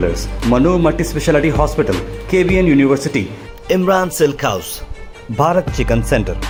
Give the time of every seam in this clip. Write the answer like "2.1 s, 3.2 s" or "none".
none

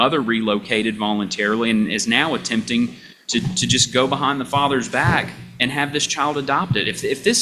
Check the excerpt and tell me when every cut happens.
none

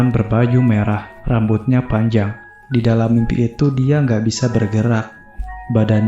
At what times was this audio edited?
2.6 s

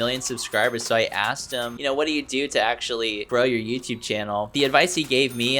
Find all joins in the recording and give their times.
1.8 s

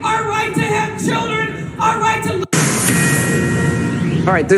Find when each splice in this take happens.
1.6 s

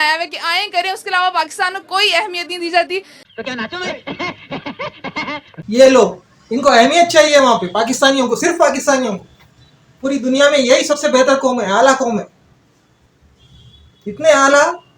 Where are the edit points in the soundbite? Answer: none

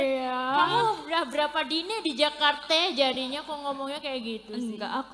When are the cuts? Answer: none

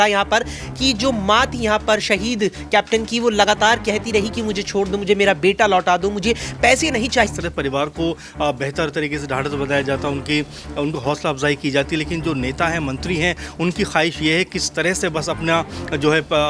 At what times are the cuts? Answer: 7.3 s

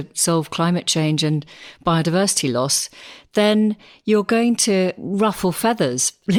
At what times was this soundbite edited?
none

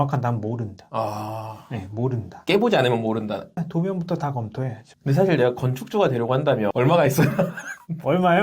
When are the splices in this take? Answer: 4.9 s, 6.7 s

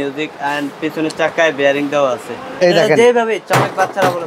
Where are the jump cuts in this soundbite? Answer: 2.4 s

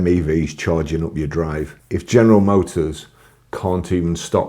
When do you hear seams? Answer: 1.8 s

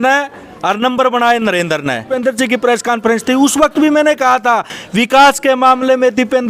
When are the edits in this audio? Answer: 2.1 s

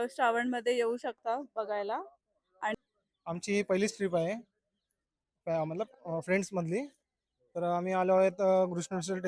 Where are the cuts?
2.7 s

